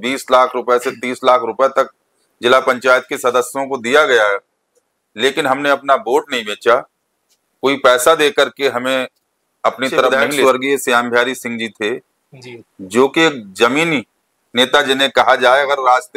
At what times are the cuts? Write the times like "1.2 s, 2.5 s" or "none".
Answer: 10.3 s